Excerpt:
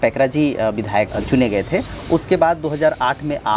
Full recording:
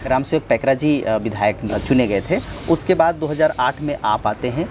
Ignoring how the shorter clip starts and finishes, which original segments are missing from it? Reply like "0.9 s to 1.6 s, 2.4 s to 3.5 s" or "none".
1.6 s to 1.7 s